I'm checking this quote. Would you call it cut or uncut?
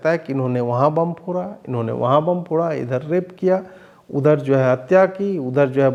uncut